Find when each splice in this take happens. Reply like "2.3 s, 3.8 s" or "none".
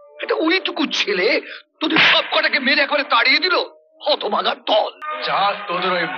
5.1 s